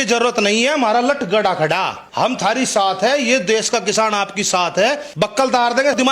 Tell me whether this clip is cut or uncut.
cut